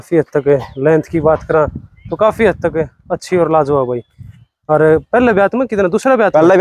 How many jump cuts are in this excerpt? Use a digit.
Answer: 0